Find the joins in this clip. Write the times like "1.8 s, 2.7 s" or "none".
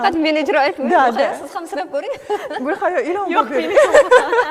none

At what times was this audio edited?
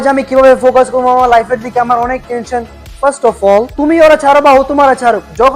3.7 s

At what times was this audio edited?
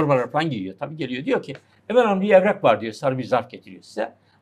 none

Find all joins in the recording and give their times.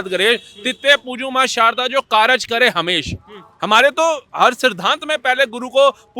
none

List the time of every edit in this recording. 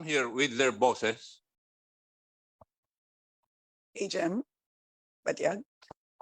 none

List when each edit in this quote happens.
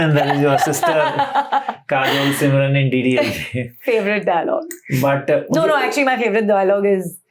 none

